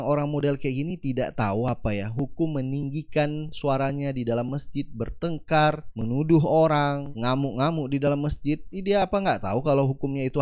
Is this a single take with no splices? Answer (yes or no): yes